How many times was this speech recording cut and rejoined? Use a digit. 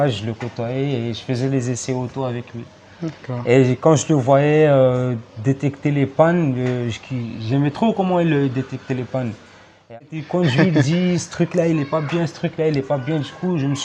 1